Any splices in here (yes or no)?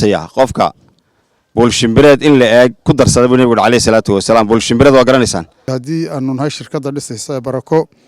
yes